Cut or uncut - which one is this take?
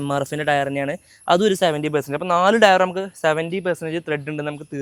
uncut